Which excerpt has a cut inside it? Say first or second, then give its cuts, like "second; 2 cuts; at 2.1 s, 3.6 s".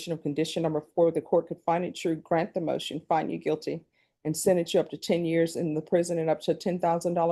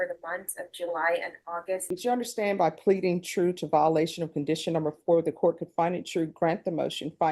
second; 1 cut; at 1.8 s